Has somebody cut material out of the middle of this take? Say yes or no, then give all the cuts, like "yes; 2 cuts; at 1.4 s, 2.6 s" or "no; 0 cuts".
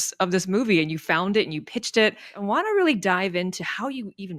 yes; 1 cut; at 2.3 s